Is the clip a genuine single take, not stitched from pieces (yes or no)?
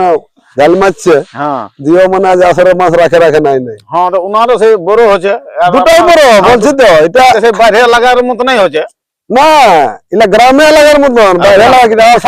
yes